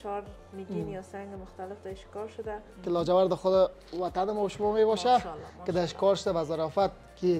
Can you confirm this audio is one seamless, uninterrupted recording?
no; 1 cut; at 2.7 s

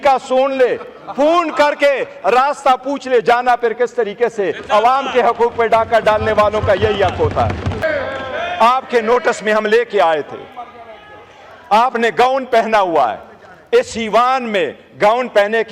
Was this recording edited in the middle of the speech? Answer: yes; 1 cut; at 7.8 s

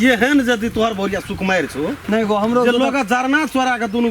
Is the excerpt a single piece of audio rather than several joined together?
no; 1 cut; at 2.0 s

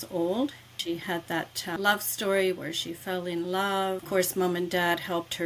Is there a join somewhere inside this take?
yes; 2 cuts; at 1.1 s, 4.0 s

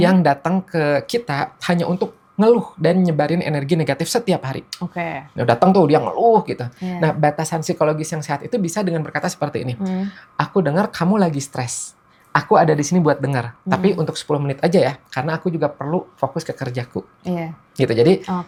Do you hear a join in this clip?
no; 0 cuts

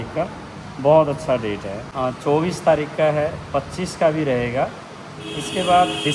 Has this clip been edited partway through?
no; 0 cuts

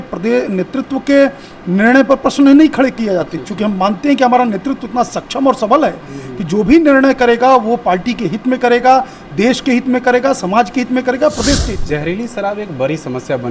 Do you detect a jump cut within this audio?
yes; 1 cut; at 11.8 s

